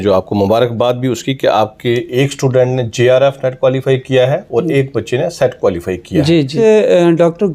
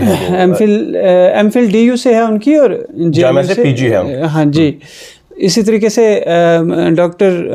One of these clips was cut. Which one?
first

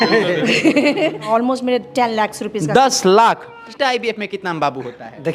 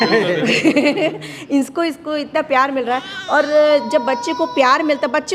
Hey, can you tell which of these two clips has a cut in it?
first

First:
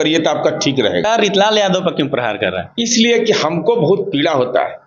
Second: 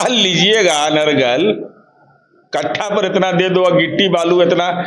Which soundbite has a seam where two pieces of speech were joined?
first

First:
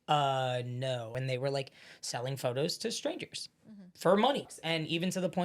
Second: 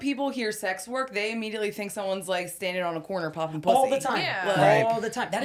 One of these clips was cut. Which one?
first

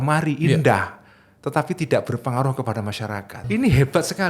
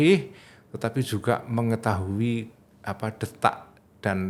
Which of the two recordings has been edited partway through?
first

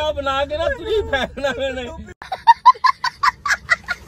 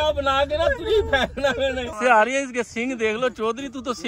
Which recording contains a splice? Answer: second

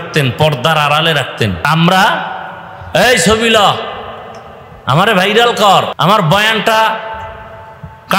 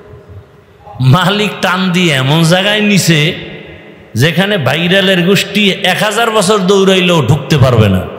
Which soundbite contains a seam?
first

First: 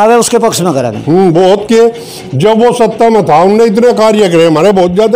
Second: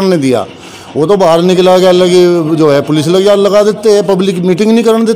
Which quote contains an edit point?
first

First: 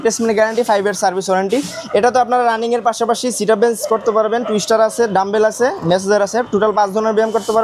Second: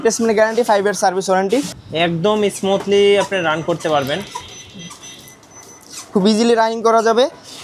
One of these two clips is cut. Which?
second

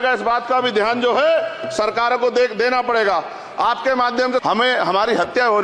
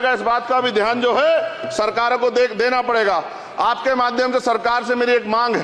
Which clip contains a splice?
first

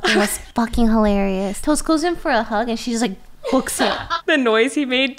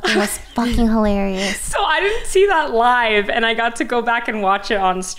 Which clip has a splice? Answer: first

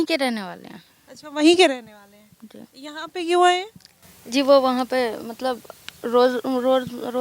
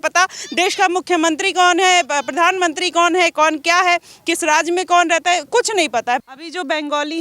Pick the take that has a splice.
second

